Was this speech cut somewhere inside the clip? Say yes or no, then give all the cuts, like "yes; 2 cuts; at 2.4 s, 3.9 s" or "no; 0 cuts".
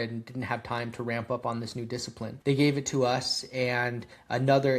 yes; 1 cut; at 2.3 s